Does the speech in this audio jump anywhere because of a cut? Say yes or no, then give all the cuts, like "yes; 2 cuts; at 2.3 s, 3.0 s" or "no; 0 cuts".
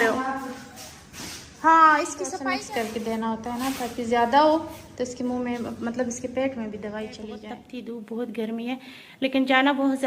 yes; 2 cuts; at 2.2 s, 7.6 s